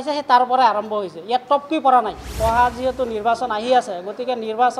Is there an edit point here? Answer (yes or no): yes